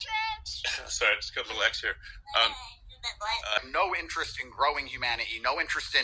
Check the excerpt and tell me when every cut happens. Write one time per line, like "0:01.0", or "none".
0:03.6